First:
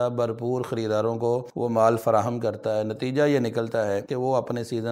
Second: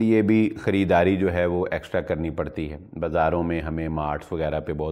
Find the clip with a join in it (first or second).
first